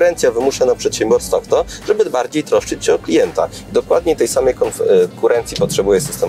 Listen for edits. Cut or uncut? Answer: uncut